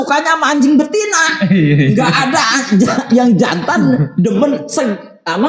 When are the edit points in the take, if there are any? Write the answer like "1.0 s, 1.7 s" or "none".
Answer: 1.7 s